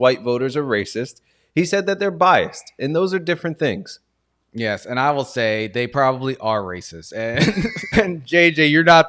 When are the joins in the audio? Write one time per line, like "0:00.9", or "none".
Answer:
0:07.9